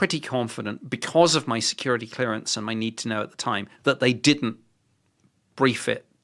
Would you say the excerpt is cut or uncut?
uncut